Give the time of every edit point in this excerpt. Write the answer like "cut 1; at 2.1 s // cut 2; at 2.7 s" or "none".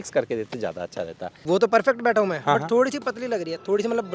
cut 1; at 1.4 s